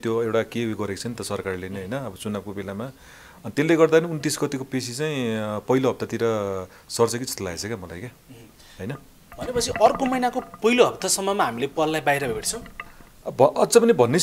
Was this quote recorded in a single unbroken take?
yes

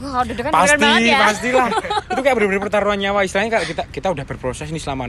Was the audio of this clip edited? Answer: no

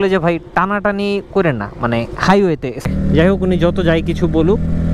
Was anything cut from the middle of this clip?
yes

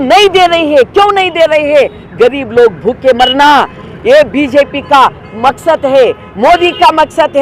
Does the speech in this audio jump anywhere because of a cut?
no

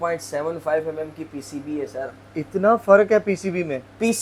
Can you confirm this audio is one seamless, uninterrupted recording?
yes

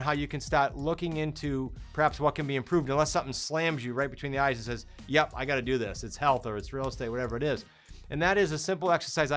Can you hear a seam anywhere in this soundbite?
no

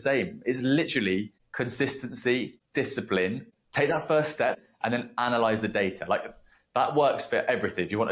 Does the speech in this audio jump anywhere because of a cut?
yes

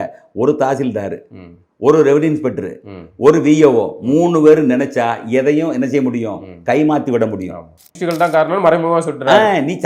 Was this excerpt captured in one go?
no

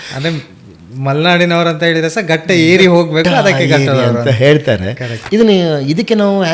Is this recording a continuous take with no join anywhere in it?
no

